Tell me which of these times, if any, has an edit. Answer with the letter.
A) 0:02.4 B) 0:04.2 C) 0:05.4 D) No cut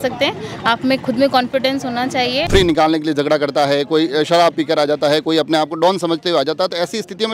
A